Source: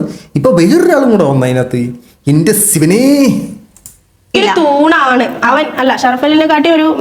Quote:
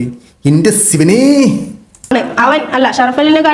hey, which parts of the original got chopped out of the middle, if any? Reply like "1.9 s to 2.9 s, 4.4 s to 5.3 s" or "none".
3.9 s to 5.1 s